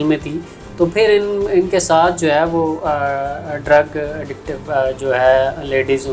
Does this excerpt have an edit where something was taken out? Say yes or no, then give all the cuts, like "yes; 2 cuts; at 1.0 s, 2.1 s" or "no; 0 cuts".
no; 0 cuts